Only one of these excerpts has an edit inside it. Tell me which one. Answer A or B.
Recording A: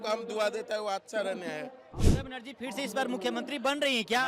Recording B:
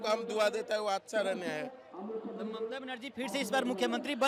A